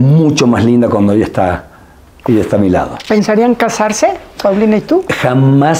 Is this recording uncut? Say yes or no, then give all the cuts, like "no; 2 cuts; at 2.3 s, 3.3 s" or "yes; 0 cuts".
no; 1 cut; at 2.9 s